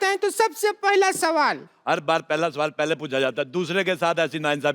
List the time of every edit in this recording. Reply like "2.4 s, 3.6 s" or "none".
1.7 s